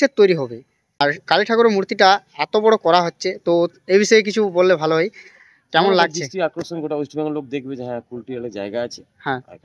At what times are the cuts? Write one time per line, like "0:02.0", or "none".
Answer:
0:01.0